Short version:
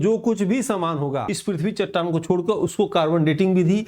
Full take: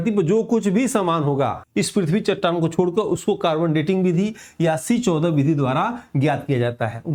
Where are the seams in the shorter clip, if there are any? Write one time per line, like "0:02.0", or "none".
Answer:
0:01.3